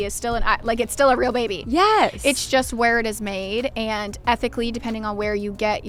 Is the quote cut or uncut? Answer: uncut